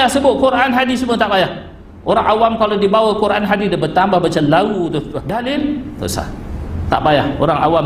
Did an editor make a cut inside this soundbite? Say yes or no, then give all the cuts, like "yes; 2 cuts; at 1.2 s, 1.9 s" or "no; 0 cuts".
yes; 1 cut; at 5.2 s